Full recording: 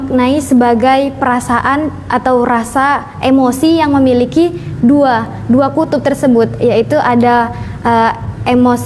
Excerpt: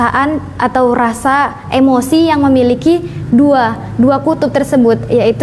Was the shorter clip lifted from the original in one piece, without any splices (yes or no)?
yes